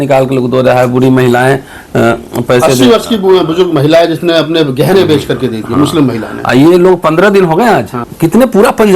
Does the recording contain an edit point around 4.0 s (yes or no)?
no